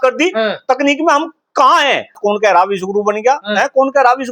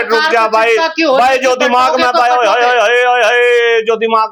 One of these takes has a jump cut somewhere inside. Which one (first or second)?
first